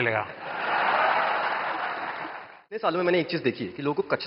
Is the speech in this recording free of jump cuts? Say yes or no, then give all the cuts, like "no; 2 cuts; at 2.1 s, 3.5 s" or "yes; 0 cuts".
no; 1 cut; at 2.8 s